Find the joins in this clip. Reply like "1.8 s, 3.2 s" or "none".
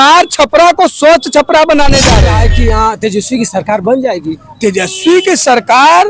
2.3 s